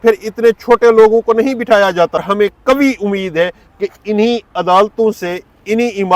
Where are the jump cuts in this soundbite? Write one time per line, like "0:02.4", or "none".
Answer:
0:02.2